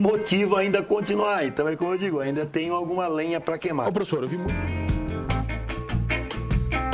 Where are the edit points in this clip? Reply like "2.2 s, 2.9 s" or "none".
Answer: 4.6 s